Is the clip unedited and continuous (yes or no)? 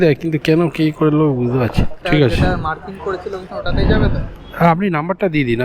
no